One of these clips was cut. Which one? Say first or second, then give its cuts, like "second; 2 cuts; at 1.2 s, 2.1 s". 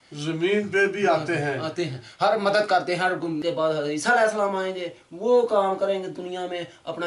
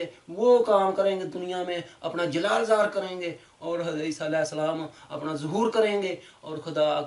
first; 1 cut; at 3.4 s